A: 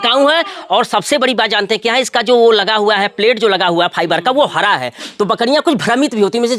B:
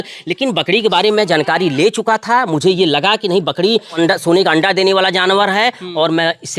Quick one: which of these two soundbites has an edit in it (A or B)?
B